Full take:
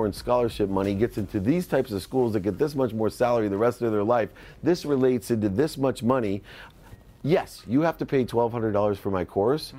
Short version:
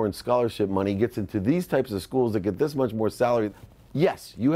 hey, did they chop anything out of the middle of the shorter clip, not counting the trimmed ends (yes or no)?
yes